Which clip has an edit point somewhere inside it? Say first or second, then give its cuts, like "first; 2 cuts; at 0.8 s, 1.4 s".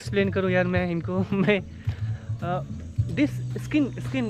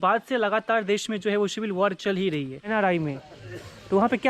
second; 1 cut; at 2.6 s